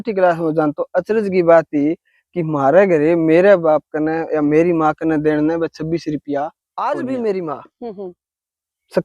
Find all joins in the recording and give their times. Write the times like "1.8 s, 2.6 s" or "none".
6.7 s